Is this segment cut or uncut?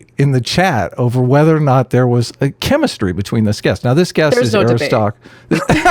uncut